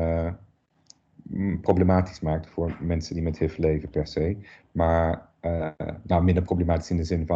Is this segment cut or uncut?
uncut